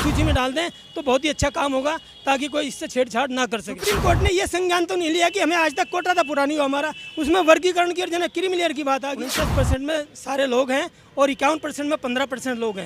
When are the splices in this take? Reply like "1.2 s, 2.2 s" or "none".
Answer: 3.7 s, 9.2 s